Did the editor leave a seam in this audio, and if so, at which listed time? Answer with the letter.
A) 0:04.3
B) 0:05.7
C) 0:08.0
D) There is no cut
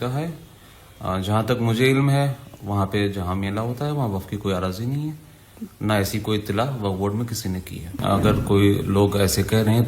C